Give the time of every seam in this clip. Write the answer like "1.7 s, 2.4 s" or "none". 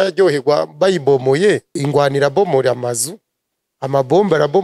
1.8 s